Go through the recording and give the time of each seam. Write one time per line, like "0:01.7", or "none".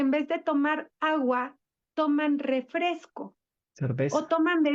none

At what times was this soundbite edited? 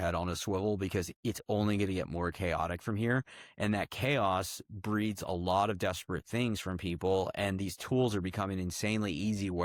none

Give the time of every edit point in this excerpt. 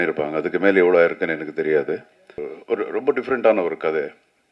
0:02.5

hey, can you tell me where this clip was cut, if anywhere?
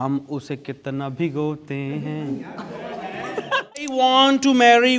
0:03.9

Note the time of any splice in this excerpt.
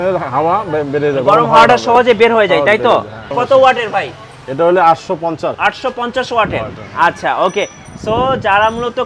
0:03.2
0:05.6

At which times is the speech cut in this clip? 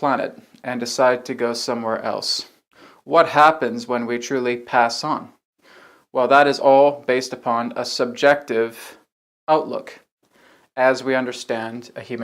0:04.6

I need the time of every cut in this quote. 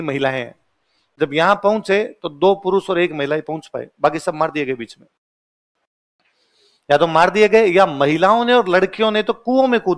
none

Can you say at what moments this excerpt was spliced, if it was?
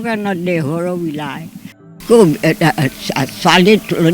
0:01.9

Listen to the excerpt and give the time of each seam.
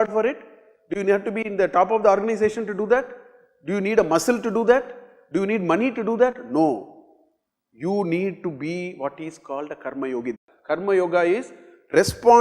0:10.5

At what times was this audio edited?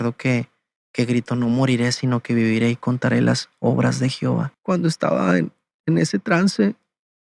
0:04.5

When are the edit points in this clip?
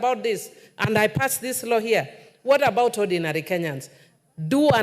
none

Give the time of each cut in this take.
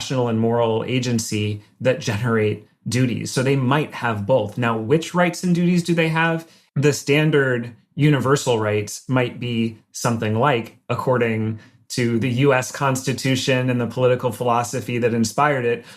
0:06.5

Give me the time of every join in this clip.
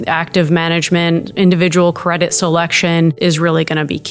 0:03.2

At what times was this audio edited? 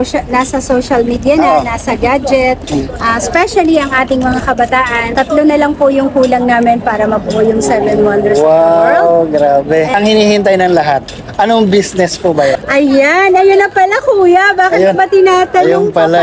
0:05.1
0:09.9
0:12.6

